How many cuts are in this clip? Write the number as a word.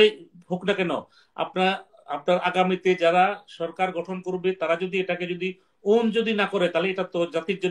zero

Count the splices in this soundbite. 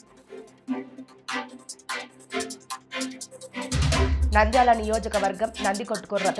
zero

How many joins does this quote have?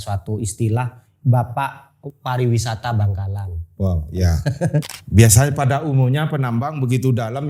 one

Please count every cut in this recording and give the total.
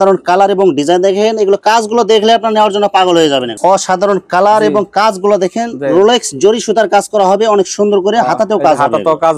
one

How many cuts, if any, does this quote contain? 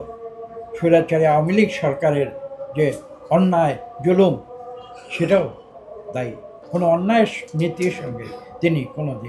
one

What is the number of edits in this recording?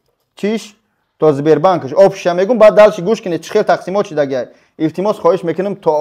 zero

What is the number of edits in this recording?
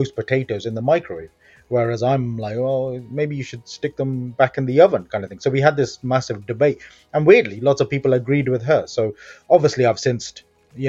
zero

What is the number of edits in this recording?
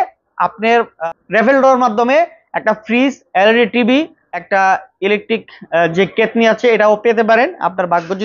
two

